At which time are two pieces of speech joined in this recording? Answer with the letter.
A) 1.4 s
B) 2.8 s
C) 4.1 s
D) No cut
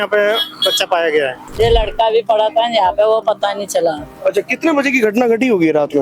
A